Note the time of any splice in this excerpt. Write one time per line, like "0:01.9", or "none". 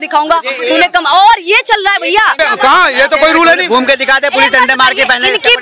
0:02.4